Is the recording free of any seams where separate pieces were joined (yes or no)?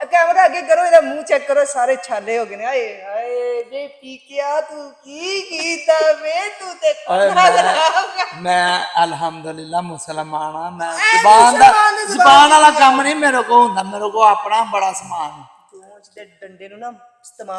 yes